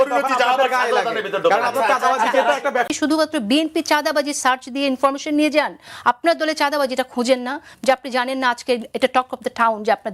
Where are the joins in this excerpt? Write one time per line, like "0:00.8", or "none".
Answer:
0:02.9